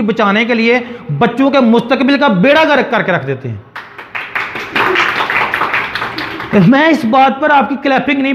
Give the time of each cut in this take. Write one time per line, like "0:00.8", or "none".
none